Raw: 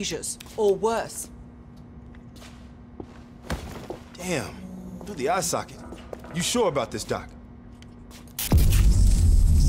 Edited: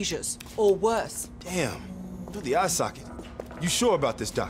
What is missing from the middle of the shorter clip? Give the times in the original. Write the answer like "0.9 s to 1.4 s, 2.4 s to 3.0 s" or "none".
1.4 s to 4.1 s